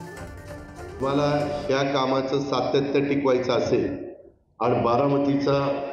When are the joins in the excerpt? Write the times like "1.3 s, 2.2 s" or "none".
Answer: 1.0 s